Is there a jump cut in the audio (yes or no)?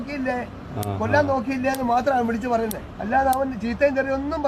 yes